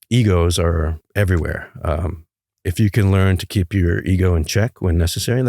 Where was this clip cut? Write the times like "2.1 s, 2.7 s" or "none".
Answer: 1.0 s, 2.6 s